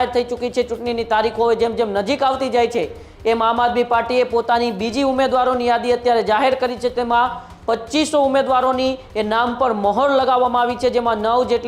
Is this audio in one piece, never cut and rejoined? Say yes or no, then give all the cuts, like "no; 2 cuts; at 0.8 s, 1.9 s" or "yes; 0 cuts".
yes; 0 cuts